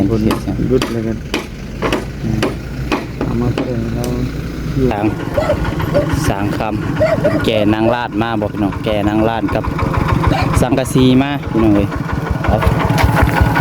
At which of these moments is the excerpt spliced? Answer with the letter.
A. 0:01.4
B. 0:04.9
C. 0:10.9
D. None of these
B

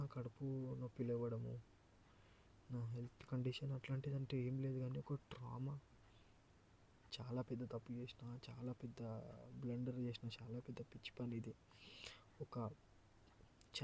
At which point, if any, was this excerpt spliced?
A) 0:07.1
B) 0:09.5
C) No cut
A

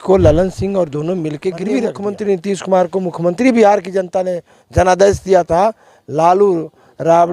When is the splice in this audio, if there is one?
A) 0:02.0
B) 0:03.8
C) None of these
A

